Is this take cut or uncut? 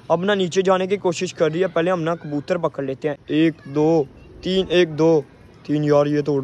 cut